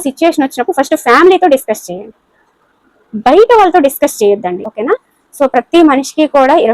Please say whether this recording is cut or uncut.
cut